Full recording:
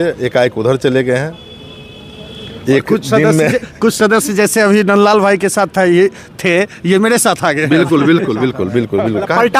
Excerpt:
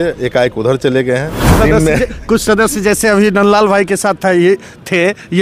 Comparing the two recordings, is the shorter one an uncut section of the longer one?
no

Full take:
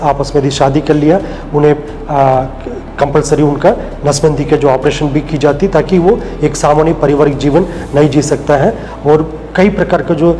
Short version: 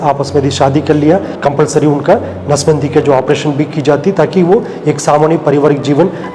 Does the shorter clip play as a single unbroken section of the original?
no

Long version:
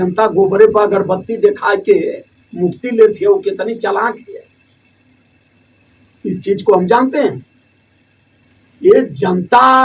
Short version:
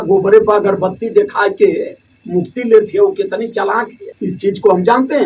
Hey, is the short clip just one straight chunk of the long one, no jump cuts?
no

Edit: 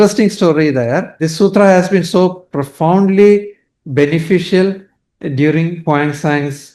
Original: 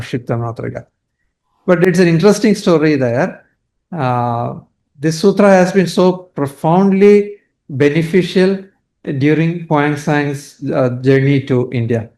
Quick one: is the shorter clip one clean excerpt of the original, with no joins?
no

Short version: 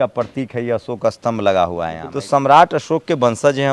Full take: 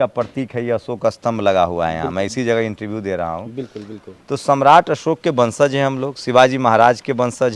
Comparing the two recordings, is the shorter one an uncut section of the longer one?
no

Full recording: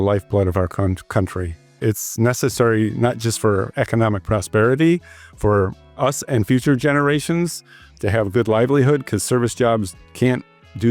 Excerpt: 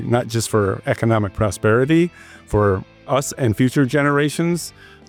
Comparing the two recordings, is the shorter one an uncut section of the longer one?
yes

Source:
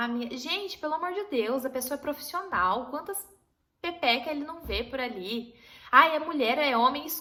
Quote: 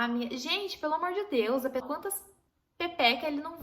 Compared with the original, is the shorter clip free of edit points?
no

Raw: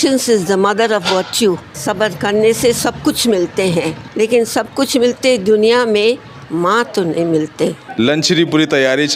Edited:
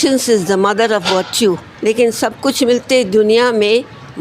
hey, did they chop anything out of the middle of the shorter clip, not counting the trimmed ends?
yes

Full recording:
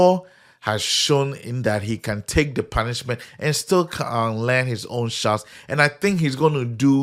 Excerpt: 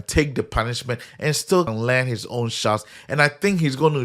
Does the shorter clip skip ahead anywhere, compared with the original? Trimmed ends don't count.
yes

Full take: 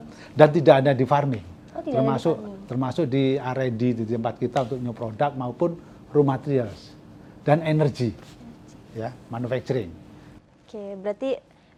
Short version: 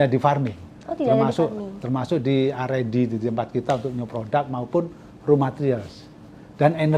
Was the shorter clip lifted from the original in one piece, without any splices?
yes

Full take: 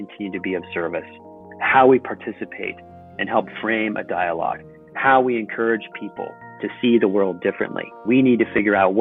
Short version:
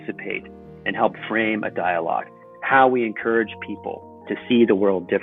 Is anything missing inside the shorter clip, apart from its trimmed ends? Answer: no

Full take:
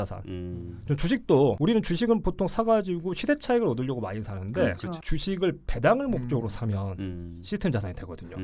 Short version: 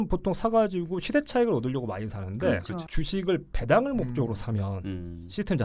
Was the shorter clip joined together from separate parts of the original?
no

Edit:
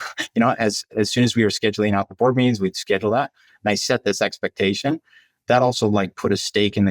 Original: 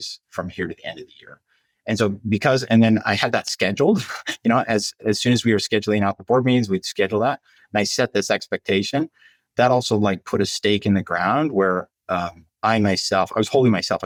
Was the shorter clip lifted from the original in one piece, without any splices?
yes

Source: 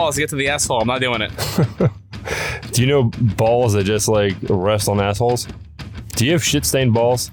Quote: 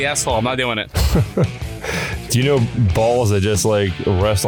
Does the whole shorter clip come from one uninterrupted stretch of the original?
yes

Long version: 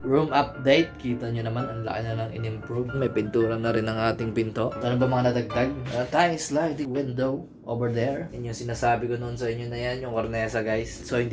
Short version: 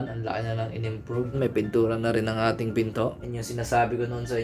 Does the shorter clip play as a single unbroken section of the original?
no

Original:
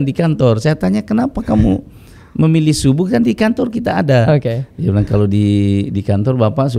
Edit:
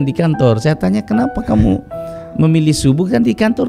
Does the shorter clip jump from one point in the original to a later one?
no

